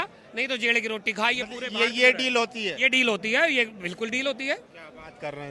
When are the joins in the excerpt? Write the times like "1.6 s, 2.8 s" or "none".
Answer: none